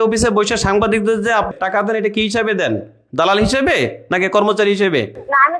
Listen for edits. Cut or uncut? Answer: uncut